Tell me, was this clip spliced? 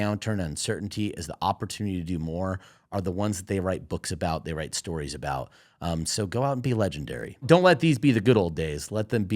yes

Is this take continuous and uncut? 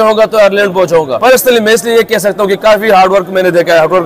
no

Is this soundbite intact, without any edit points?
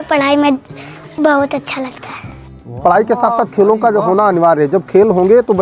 no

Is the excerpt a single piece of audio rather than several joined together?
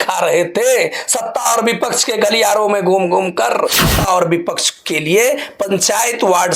no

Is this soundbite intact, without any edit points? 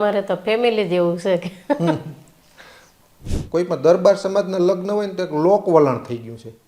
no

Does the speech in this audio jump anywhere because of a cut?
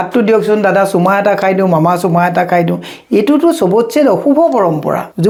no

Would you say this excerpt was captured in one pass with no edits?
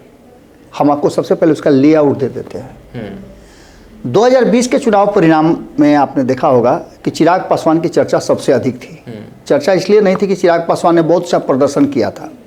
yes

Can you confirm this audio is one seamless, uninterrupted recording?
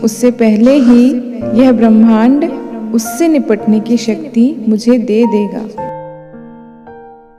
no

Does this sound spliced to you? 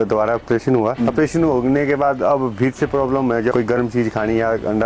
yes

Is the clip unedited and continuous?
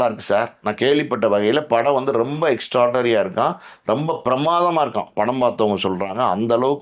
yes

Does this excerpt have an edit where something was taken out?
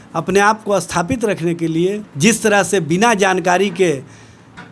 yes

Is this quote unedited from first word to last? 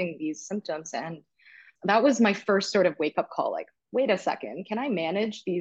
yes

